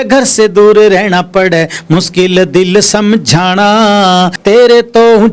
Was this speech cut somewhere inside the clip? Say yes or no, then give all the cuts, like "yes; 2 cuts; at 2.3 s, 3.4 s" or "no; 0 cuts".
yes; 1 cut; at 4.4 s